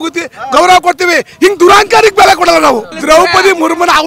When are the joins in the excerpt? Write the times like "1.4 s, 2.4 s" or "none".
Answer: 2.9 s